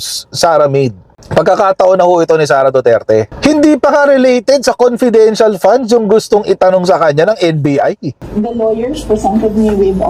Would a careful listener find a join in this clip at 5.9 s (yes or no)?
no